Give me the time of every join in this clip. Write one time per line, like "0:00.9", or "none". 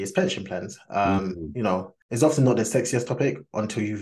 0:02.0